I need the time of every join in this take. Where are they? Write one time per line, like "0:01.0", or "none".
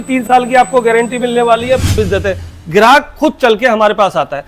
0:02.0